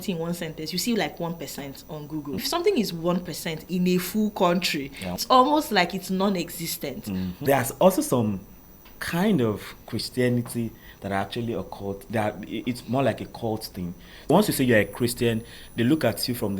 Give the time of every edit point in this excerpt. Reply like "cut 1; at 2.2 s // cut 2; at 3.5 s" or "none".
cut 1; at 2.5 s // cut 2; at 5.2 s // cut 3; at 7.3 s // cut 4; at 14.3 s